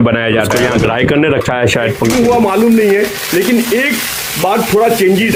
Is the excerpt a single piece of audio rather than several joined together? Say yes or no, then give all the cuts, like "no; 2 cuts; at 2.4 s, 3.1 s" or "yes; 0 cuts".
yes; 0 cuts